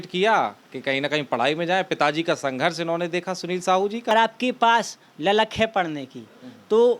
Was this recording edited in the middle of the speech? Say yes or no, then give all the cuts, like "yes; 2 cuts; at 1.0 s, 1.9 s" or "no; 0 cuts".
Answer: yes; 1 cut; at 4.1 s